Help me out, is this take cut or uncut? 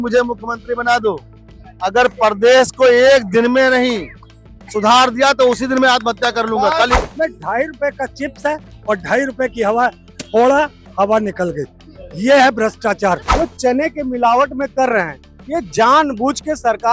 cut